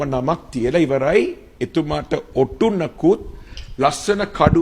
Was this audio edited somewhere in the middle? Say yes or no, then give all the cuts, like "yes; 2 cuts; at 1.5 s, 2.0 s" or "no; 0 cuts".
no; 0 cuts